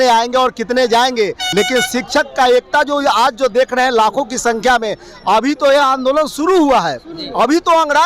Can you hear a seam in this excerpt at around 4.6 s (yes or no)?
no